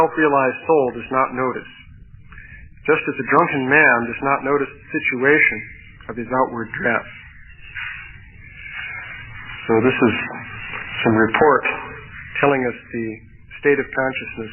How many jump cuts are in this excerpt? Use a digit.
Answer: 0